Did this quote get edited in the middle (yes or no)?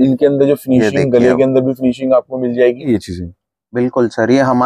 yes